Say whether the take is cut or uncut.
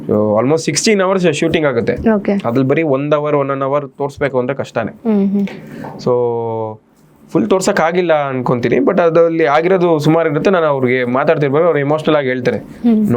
uncut